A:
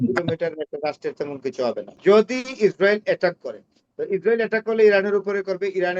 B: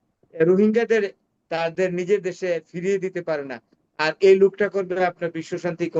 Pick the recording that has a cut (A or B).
A